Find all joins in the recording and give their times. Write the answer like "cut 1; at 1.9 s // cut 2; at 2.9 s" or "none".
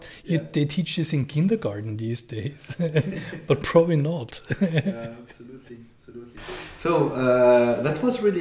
none